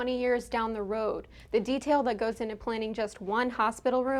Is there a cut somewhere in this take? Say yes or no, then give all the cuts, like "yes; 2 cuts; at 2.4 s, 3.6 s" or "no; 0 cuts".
no; 0 cuts